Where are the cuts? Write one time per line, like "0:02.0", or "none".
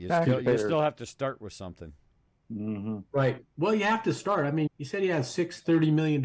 0:04.7